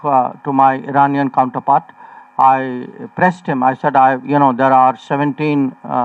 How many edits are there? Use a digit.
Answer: 0